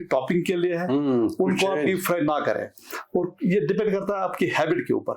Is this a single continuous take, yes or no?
yes